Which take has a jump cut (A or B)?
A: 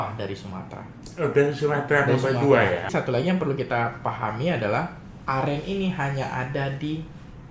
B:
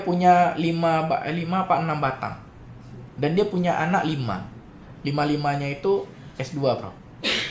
A